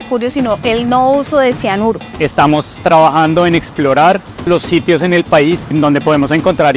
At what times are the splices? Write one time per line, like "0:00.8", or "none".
0:02.1
0:04.5
0:05.7